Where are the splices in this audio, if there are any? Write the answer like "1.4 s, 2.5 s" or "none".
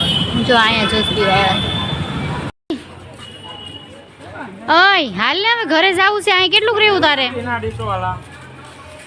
2.7 s